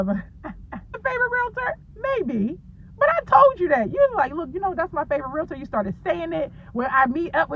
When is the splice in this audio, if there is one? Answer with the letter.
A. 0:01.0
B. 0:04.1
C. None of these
A